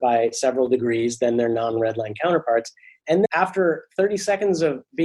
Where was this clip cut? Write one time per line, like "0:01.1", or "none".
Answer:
0:03.3